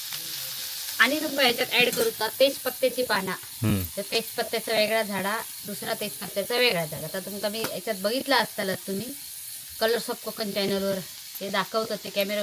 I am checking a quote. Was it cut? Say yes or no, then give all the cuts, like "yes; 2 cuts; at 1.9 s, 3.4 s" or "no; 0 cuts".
no; 0 cuts